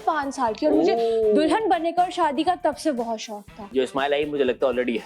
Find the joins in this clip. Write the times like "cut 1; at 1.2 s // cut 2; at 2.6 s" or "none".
cut 1; at 3.7 s